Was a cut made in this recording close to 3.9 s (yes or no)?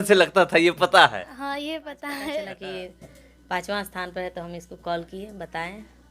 no